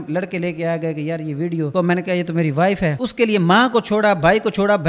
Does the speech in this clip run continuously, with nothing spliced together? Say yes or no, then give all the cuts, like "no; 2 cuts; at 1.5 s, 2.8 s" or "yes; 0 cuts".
no; 1 cut; at 3.0 s